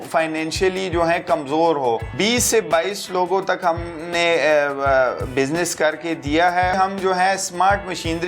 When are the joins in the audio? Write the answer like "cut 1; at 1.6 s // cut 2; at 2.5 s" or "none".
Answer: cut 1; at 2.1 s // cut 2; at 6.7 s